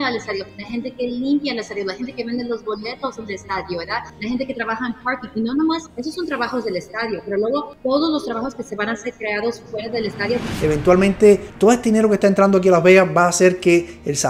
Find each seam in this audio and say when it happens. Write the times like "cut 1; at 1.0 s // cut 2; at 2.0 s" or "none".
cut 1; at 10.5 s